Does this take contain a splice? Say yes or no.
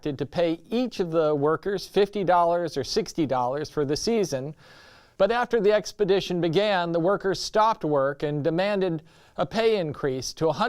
yes